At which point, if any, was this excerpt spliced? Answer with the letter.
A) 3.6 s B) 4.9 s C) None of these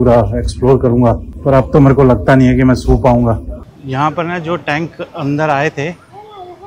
A